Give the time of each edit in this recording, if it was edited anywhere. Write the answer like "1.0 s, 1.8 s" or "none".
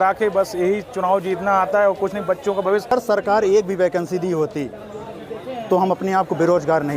2.9 s